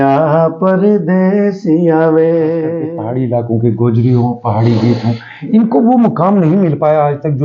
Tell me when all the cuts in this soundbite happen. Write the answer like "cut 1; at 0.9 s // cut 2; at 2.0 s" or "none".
cut 1; at 2.9 s